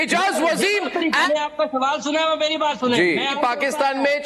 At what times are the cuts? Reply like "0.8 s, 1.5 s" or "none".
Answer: 1.3 s, 3.3 s